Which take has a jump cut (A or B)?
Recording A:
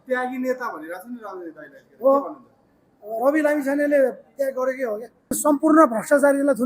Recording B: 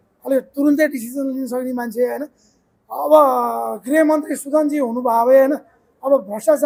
A